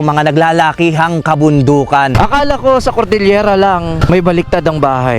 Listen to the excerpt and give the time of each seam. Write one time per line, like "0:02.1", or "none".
0:02.1
0:04.0